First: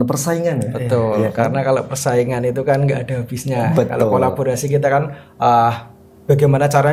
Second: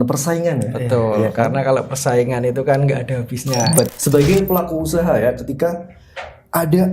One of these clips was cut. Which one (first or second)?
second